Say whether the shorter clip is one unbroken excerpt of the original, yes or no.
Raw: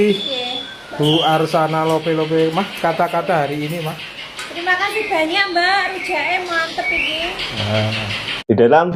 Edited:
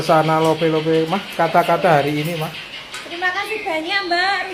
yes